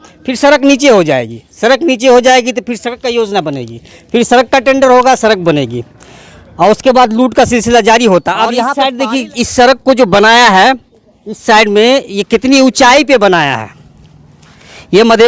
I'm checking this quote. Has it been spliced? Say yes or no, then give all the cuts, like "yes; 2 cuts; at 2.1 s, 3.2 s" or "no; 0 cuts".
yes; 1 cut; at 8.7 s